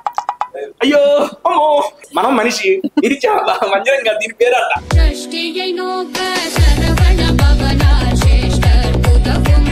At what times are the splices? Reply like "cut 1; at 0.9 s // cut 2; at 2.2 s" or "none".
cut 1; at 2.0 s // cut 2; at 4.9 s